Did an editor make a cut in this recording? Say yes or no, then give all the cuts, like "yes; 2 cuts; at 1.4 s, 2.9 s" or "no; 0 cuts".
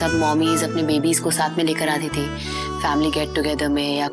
no; 0 cuts